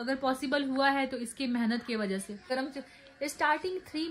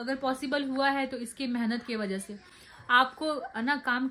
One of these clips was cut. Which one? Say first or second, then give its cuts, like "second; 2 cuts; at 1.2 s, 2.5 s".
first; 1 cut; at 2.5 s